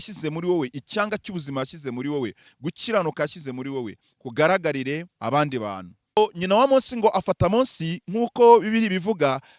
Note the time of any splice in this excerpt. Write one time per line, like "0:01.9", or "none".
0:06.2